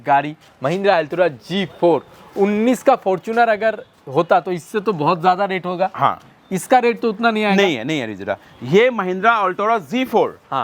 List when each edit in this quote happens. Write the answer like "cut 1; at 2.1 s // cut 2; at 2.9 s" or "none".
none